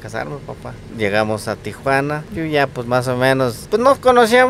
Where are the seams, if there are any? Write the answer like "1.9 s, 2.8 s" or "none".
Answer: 0.9 s, 2.3 s, 3.6 s